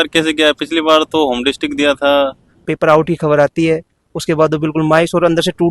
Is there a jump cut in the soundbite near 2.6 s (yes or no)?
yes